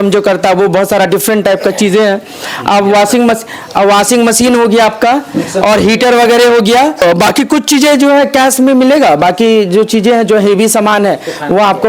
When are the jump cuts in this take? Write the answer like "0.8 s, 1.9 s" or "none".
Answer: 7.0 s